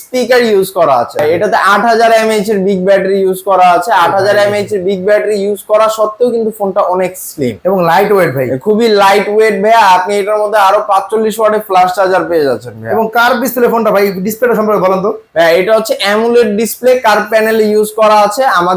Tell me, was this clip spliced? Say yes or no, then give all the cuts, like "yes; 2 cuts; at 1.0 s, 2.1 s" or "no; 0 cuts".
yes; 1 cut; at 1.2 s